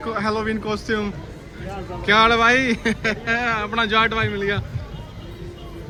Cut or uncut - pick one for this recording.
uncut